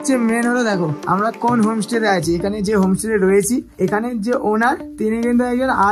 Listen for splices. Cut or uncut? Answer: cut